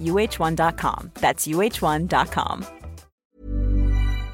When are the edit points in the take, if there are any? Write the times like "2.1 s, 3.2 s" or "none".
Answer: 3.2 s